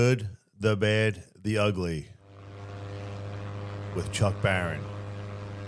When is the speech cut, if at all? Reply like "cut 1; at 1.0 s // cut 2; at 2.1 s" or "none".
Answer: none